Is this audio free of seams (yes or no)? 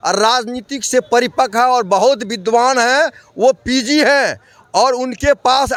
yes